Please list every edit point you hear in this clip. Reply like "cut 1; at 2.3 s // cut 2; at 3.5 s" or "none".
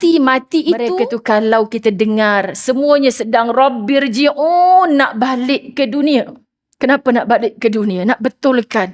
cut 1; at 0.9 s